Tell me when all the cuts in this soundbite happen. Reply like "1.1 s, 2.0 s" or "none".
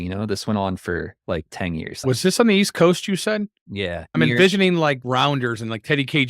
2.0 s, 4.0 s